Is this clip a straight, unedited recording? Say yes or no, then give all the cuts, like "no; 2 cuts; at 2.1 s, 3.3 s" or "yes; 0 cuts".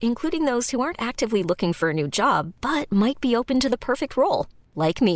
yes; 0 cuts